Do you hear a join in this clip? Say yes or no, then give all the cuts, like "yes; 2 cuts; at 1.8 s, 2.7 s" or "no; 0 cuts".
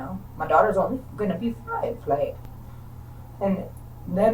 no; 0 cuts